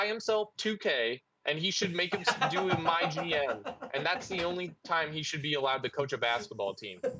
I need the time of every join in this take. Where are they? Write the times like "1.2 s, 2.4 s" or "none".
none